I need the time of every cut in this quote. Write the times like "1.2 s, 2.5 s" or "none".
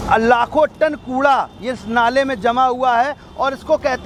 none

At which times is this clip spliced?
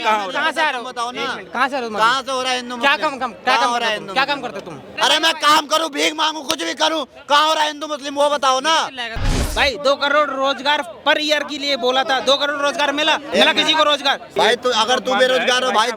4.8 s, 9.4 s, 13.2 s, 14.3 s

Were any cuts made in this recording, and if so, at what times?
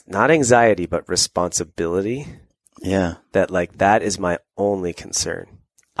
none

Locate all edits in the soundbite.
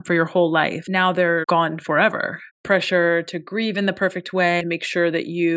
1.3 s, 2.5 s, 4.6 s

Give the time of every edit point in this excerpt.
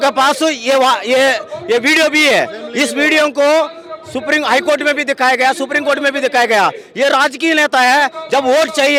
none

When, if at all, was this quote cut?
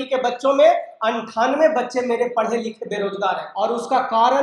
3.5 s

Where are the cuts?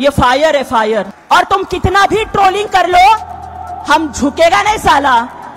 1.2 s

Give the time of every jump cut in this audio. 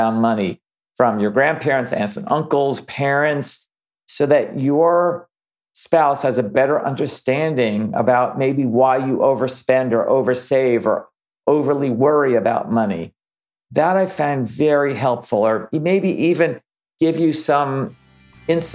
none

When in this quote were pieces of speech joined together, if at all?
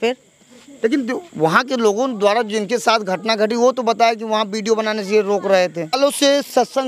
6.0 s

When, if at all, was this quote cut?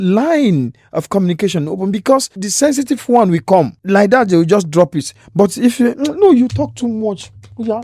2.4 s, 3.8 s

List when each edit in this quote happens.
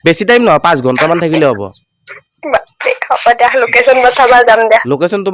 2.0 s

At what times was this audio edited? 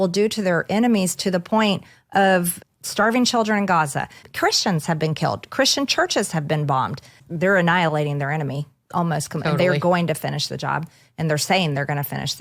2.6 s, 4.2 s, 7.2 s

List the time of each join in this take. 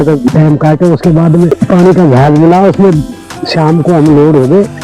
1.6 s

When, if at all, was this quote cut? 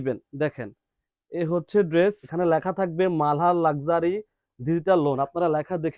2.2 s

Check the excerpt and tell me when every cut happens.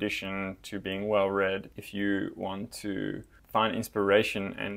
1.7 s, 3.3 s

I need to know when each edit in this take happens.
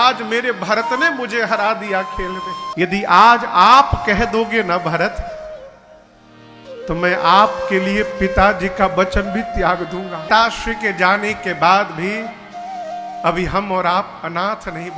2.7 s, 10.3 s

